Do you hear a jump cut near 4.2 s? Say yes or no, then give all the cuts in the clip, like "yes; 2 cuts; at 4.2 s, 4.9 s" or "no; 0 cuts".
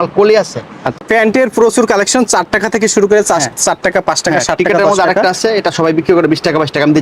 no; 1 cut; at 1.0 s